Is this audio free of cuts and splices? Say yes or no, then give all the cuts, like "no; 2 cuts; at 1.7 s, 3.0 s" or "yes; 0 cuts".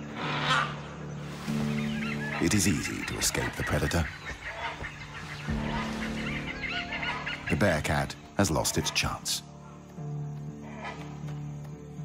no; 1 cut; at 1.2 s